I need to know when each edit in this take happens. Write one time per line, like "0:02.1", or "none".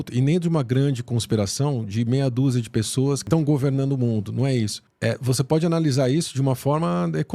0:03.2

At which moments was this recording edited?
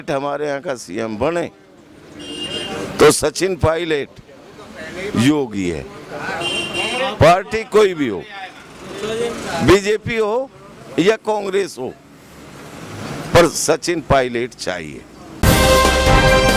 0:15.3

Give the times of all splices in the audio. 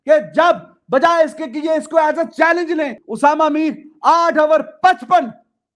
0:03.0

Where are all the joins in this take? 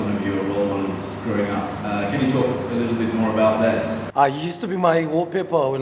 none

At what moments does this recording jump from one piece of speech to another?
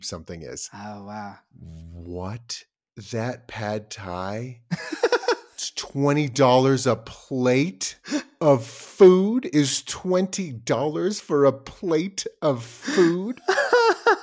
0:13.3

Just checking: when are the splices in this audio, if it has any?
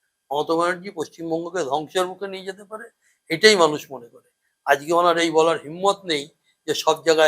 none

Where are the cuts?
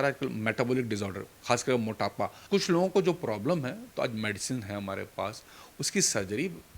0:02.4

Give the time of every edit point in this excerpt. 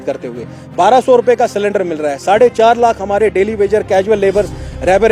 none

